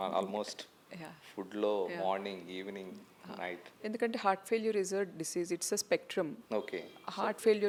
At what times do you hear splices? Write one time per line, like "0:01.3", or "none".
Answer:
none